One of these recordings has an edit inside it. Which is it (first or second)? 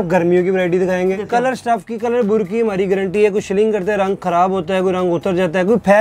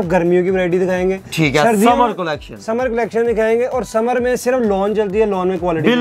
first